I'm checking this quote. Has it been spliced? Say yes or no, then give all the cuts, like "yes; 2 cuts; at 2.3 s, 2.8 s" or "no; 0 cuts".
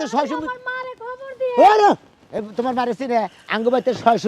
no; 0 cuts